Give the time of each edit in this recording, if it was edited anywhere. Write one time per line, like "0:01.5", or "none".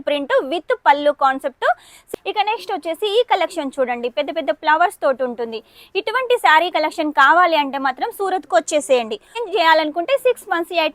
0:02.1
0:09.4